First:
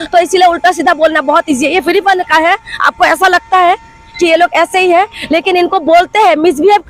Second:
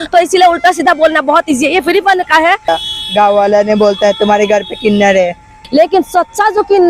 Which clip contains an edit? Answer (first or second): second